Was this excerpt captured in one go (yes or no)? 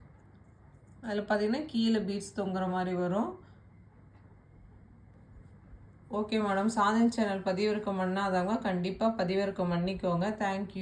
no